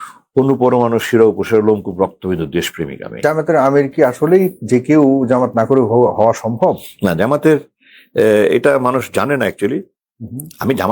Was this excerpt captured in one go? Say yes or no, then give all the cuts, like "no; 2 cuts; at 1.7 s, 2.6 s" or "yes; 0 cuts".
no; 1 cut; at 3.2 s